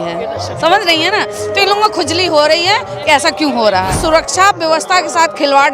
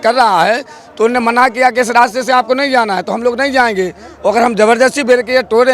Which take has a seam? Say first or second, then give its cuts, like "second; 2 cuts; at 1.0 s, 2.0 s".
first; 1 cut; at 4.0 s